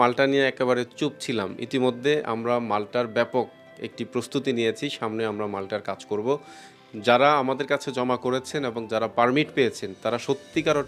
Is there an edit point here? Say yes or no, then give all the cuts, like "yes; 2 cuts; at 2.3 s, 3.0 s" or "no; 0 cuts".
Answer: no; 0 cuts